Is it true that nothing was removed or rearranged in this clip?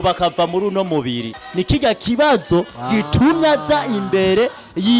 no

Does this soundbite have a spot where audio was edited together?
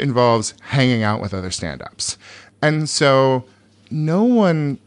no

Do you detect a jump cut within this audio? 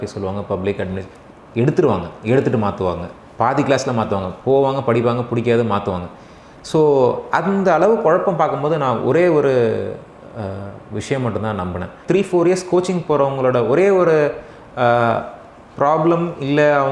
yes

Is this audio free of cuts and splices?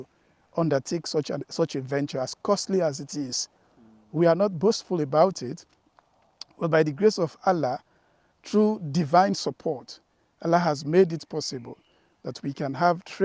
yes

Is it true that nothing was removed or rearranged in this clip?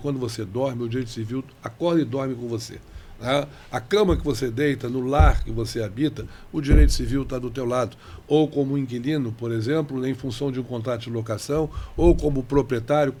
yes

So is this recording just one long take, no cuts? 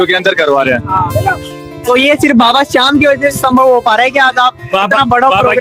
yes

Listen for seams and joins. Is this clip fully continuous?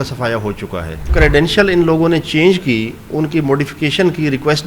no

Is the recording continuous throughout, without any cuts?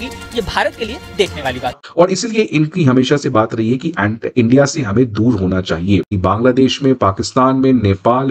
no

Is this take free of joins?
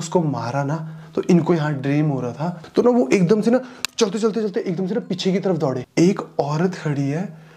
no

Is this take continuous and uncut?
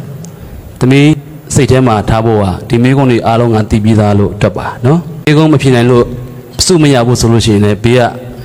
no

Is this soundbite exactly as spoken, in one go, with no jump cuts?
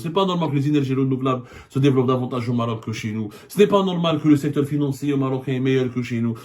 yes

